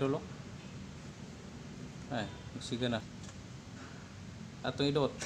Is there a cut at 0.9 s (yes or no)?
no